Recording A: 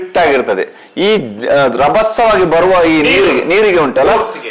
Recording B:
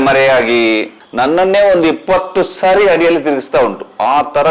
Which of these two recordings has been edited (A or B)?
B